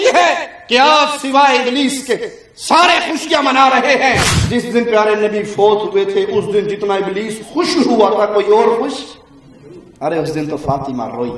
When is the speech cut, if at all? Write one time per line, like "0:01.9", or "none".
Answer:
0:04.3